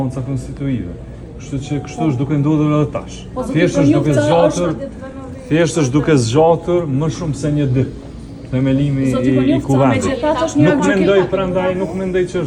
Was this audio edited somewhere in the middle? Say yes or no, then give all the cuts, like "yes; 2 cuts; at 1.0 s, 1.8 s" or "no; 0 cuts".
no; 0 cuts